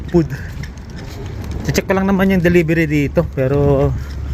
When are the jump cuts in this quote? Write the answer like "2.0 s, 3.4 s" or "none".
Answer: none